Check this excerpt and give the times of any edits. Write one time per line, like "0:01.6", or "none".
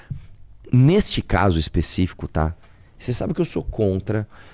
none